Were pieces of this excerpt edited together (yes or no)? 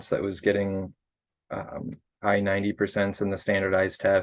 no